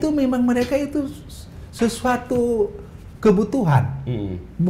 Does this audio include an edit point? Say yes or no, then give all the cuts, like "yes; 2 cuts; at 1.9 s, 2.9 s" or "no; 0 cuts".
no; 0 cuts